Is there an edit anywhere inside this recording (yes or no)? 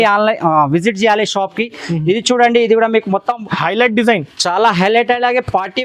no